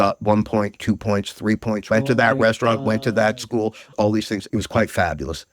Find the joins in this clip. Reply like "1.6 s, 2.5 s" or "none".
1.8 s, 3.9 s

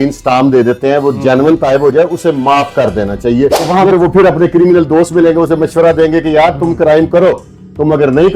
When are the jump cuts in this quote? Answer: 3.7 s

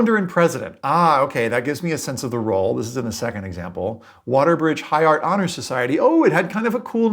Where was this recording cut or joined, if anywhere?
none

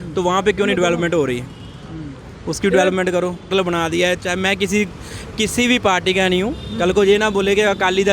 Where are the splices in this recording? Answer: 3.5 s

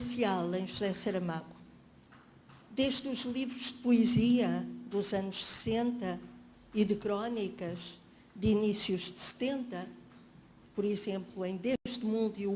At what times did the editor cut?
9.2 s

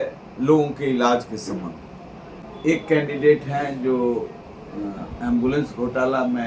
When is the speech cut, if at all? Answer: 2.5 s

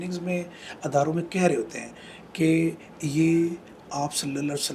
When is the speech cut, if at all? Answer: none

